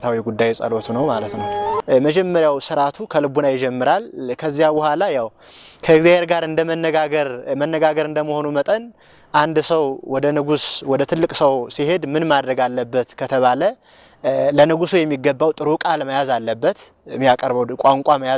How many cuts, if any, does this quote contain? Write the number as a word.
one